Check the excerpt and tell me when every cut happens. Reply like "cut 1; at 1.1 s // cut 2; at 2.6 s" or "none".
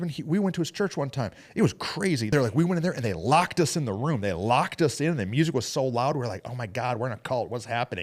cut 1; at 2.3 s